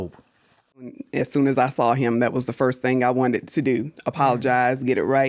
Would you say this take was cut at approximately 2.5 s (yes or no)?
no